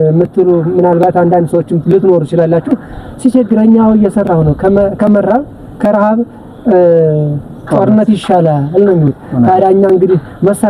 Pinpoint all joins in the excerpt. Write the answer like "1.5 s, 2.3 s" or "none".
none